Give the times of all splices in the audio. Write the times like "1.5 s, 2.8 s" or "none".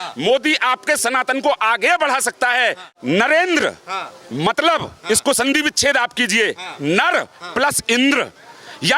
2.9 s